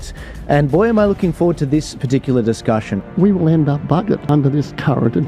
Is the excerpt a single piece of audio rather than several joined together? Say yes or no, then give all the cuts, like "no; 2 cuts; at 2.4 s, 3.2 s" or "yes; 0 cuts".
no; 2 cuts; at 3.0 s, 4.2 s